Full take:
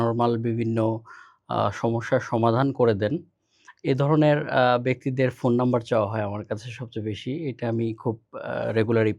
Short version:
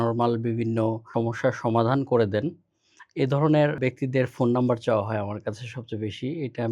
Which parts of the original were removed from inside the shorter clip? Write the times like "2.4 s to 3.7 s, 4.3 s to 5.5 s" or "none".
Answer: 1.1 s to 1.8 s, 4.5 s to 4.8 s